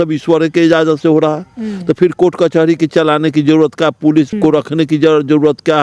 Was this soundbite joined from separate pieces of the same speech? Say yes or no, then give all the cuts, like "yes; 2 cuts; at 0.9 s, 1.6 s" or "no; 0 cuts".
yes; 1 cut; at 4.3 s